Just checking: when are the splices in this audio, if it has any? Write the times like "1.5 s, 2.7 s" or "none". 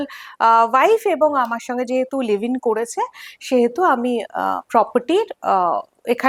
none

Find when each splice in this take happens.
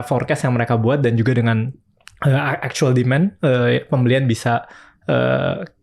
none

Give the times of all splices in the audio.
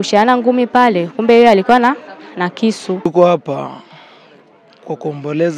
3.1 s

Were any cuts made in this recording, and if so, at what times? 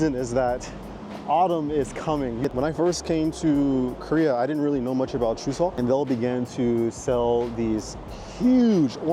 2.4 s, 5.7 s

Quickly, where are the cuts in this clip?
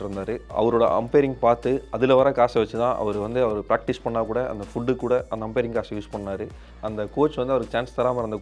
6.7 s

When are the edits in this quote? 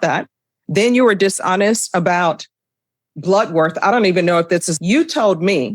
4.7 s

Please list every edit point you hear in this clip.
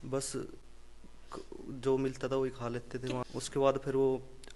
3.2 s

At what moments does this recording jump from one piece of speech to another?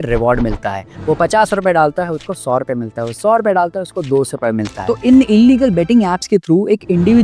4.7 s

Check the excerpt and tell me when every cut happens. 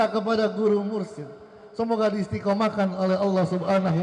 none

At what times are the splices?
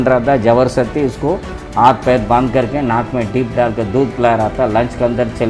none

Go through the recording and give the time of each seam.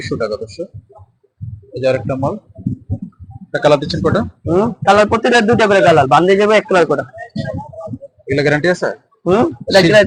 none

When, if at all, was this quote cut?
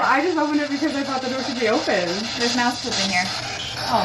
none

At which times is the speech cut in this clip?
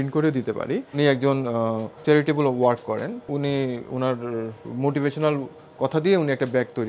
0.9 s, 1.9 s, 3.3 s, 4.6 s

